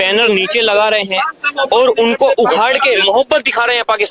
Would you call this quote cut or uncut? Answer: uncut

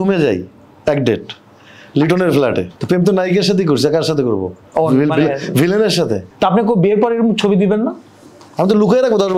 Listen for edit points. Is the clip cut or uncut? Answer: cut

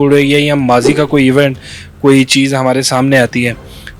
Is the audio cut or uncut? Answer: uncut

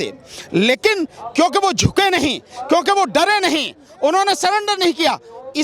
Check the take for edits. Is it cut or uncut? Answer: uncut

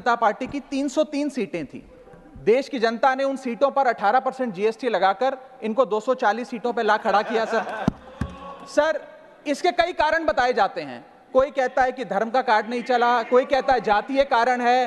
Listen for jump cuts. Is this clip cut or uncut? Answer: uncut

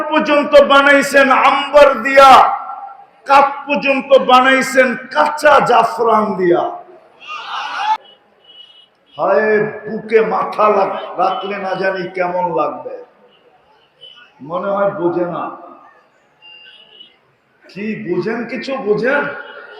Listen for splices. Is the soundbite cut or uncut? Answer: cut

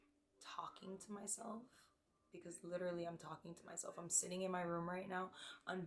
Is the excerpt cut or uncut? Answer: uncut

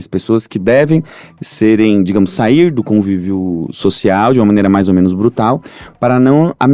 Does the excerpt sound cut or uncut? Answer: uncut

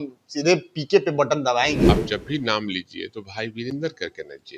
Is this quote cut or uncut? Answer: cut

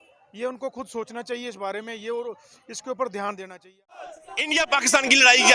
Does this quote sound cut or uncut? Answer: cut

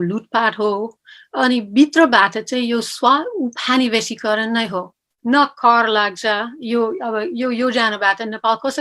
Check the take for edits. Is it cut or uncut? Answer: cut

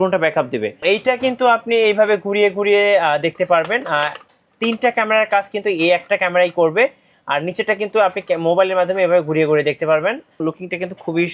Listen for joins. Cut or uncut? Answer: cut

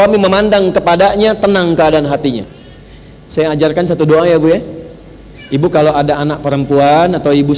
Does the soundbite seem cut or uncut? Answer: cut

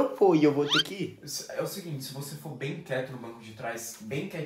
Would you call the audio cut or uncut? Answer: uncut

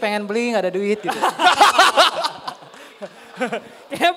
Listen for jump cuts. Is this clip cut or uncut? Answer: uncut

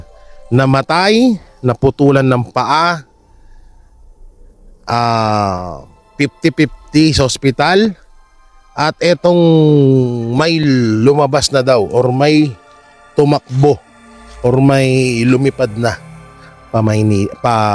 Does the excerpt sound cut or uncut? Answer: uncut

